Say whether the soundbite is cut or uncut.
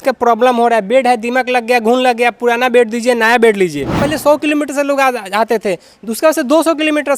cut